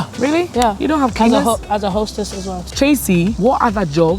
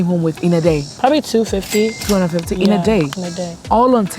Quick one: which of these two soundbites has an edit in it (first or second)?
first